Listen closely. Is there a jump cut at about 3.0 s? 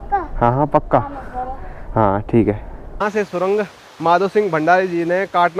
yes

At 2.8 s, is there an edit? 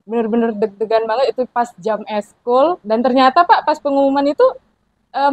yes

